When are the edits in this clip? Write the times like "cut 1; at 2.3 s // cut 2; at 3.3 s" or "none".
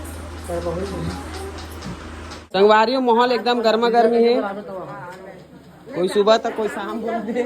cut 1; at 2.6 s